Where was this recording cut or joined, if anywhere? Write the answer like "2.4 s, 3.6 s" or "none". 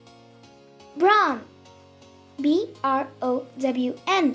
0.9 s

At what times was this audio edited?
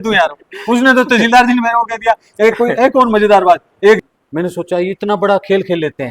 4.0 s

